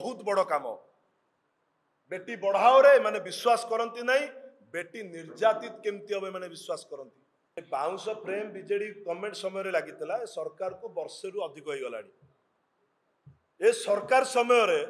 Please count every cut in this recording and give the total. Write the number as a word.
one